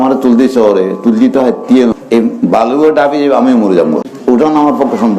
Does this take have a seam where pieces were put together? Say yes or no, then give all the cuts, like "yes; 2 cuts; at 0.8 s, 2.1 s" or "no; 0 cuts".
yes; 2 cuts; at 1.9 s, 4.1 s